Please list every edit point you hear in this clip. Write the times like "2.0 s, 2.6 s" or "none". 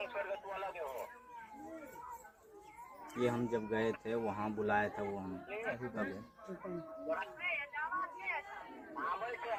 none